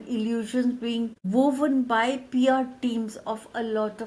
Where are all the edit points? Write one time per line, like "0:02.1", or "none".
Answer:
none